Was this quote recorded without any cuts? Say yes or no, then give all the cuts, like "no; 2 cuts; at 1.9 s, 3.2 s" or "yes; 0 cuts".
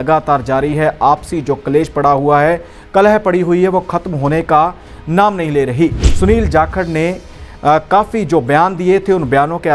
no; 1 cut; at 6.0 s